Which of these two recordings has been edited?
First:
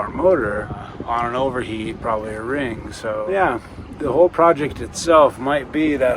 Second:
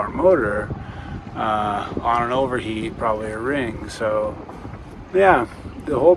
first; 2 cuts; at 0.9 s, 3.3 s

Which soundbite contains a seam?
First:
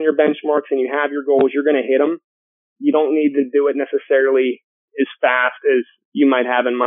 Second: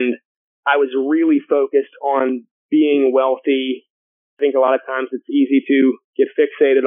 second; 3 cuts; at 2.5 s, 4.2 s, 6.0 s

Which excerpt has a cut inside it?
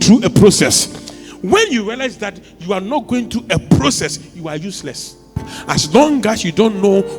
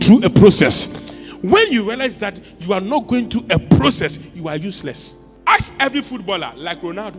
first; 1 cut; at 5.2 s

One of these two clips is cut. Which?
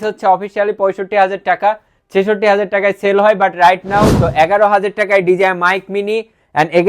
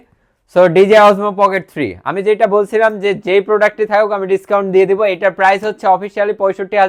first; 1 cut; at 4.2 s

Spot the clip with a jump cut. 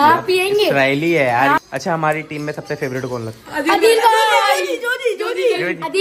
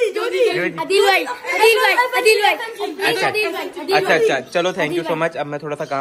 first; 1 cut; at 1.6 s

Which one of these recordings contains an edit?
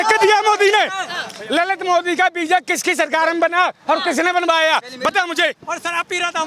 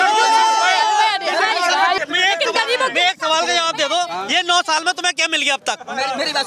second; 1 cut; at 2.0 s

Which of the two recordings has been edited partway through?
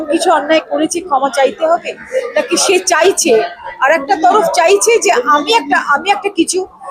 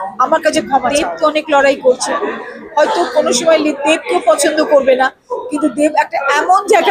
second; 1 cut; at 0.9 s

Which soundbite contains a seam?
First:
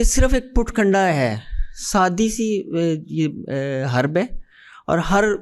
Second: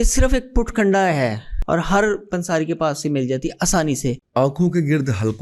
second; 2 cuts; at 1.5 s, 4.2 s

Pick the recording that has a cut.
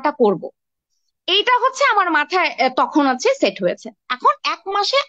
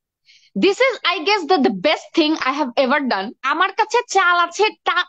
second; 1 cut; at 3.4 s

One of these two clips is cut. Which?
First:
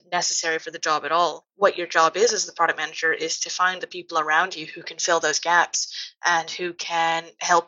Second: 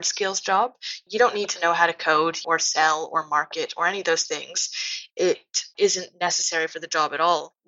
second; 2 cuts; at 2.4 s, 4.9 s

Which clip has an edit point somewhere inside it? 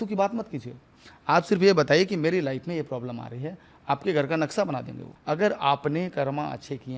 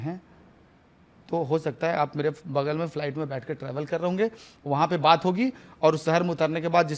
first; 1 cut; at 5.1 s

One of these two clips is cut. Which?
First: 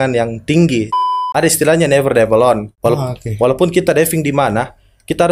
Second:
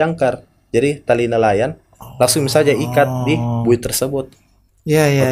first; 2 cuts; at 0.9 s, 2.7 s

